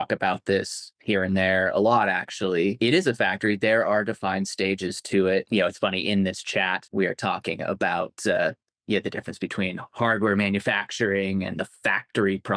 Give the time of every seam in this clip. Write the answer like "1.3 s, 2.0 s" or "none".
2.8 s, 5.5 s, 6.8 s